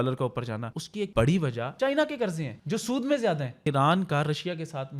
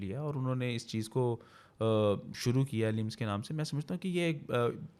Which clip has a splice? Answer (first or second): first